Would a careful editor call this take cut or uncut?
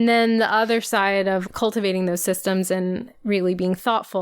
cut